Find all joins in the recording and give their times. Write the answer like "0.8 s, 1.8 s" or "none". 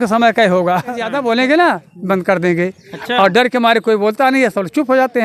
1.1 s